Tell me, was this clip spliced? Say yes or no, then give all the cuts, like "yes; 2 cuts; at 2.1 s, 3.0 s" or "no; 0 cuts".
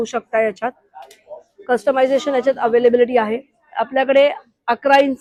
no; 0 cuts